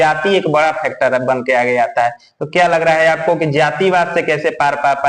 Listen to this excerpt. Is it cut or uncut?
uncut